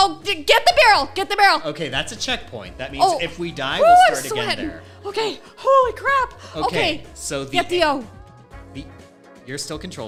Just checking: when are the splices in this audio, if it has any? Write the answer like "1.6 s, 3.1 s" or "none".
none